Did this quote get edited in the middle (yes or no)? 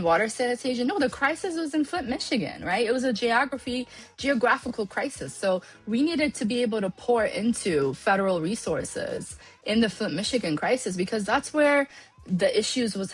yes